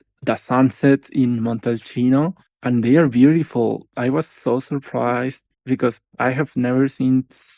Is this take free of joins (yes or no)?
no